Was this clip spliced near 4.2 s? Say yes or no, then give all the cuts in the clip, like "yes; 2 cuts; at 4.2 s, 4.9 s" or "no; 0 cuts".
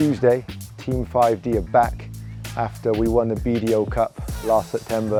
no; 0 cuts